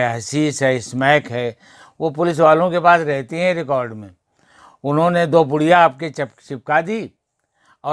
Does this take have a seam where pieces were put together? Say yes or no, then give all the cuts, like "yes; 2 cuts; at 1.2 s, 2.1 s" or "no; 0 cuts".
no; 0 cuts